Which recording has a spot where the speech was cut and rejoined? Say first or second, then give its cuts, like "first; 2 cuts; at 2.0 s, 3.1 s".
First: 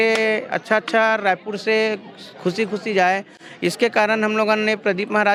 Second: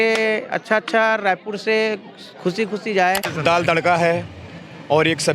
second; 1 cut; at 3.3 s